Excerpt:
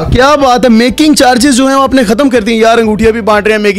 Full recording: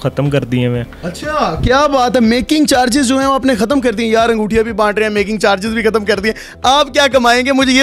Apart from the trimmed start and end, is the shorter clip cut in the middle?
no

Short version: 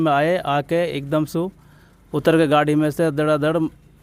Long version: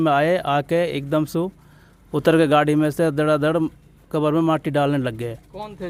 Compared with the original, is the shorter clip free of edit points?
yes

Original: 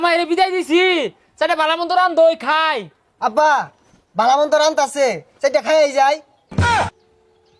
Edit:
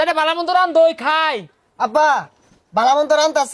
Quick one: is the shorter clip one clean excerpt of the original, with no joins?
yes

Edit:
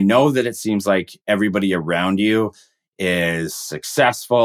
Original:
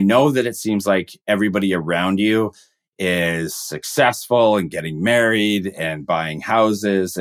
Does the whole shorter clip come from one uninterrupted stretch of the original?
yes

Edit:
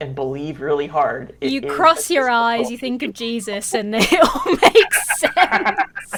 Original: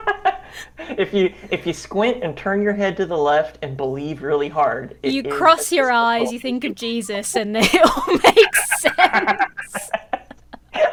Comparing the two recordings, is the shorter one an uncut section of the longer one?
yes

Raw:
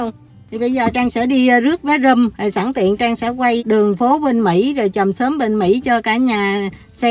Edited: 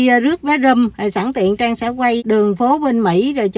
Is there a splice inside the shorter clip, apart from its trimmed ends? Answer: no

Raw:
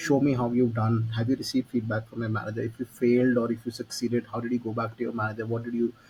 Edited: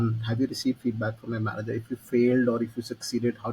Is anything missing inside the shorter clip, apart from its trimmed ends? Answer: no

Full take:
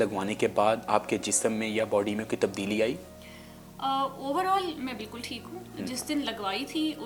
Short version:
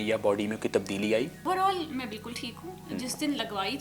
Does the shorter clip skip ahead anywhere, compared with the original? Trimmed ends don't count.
yes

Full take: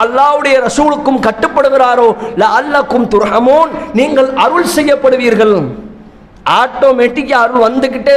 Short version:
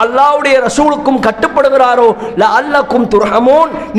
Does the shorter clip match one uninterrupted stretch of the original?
yes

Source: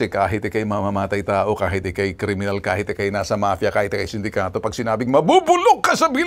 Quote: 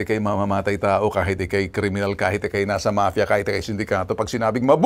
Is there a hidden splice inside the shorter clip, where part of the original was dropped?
no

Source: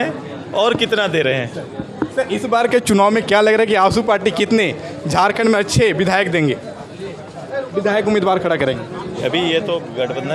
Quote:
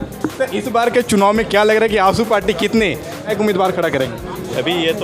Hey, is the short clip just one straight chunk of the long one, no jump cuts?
no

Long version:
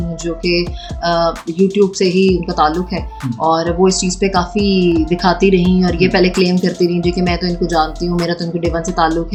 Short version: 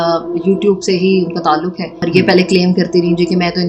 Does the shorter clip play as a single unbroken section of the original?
no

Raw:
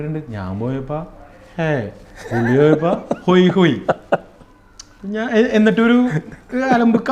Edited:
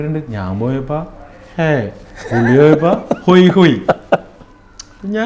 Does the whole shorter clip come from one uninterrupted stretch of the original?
yes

